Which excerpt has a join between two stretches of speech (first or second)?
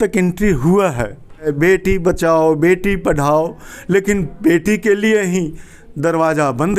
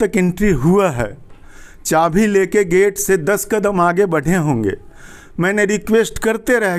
first